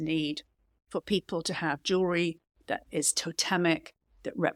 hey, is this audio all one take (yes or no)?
yes